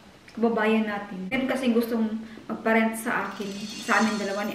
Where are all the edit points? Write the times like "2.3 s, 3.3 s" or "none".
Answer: 1.4 s